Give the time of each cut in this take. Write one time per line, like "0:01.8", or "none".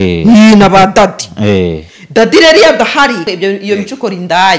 0:03.3